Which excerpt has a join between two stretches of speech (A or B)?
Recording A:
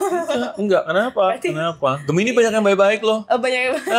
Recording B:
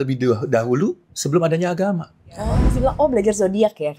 B